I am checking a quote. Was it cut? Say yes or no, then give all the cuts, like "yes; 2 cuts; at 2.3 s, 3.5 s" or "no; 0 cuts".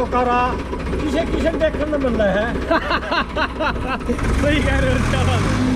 no; 0 cuts